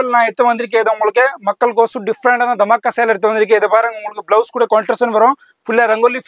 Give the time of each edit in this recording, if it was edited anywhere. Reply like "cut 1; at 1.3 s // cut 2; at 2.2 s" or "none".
none